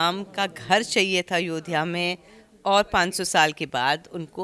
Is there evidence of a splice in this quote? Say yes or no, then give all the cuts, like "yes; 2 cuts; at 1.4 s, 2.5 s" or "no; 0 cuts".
no; 0 cuts